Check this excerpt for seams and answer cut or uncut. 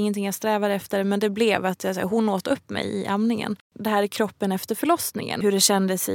cut